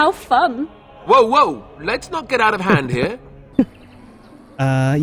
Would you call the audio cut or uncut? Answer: cut